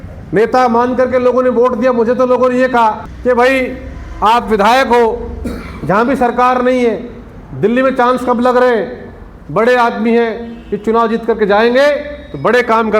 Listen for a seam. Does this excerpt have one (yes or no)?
yes